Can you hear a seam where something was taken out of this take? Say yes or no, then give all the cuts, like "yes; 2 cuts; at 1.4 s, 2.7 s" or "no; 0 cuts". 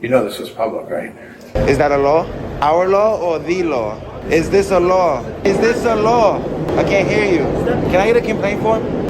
yes; 1 cut; at 1.4 s